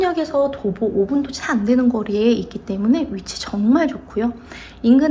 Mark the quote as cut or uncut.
uncut